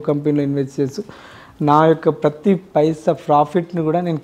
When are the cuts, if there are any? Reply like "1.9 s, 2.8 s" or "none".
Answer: none